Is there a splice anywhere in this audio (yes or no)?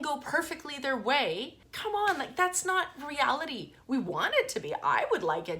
yes